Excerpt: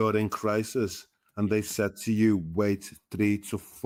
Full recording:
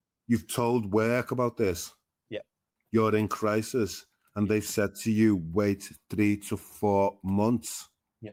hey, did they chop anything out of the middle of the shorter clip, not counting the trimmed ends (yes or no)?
no